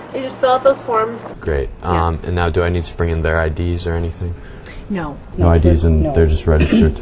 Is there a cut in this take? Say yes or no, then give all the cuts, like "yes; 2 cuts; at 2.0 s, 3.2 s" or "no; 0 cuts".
yes; 2 cuts; at 1.3 s, 5.2 s